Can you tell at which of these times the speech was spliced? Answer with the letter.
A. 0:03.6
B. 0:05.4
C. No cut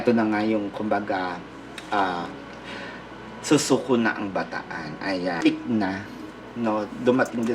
B